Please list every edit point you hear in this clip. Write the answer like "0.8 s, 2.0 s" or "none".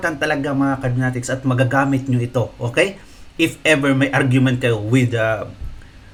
none